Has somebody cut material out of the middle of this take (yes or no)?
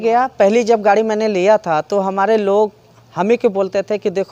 no